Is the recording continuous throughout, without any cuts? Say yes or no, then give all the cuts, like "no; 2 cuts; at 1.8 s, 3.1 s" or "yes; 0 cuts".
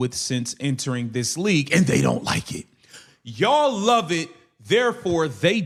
yes; 0 cuts